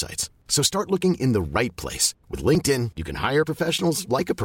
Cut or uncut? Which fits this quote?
uncut